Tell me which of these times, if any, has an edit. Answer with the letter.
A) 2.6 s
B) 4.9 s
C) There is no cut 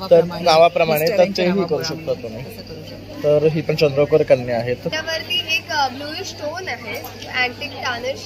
B